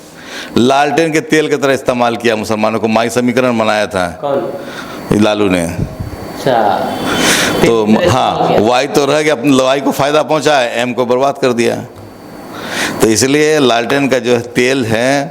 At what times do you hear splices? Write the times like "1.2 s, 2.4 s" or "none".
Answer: none